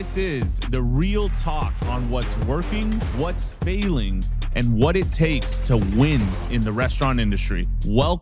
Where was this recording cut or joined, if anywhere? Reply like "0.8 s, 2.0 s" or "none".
none